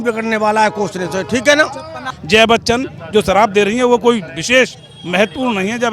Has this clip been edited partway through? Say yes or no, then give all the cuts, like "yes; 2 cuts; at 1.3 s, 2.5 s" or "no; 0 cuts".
yes; 1 cut; at 2.1 s